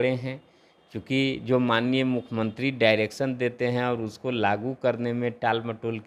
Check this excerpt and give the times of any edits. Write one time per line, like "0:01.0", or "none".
none